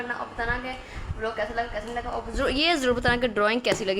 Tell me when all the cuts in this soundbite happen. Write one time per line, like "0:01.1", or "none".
none